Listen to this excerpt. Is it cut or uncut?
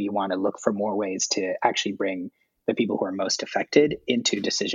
uncut